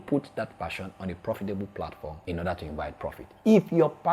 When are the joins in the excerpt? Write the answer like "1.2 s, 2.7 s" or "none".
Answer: 2.1 s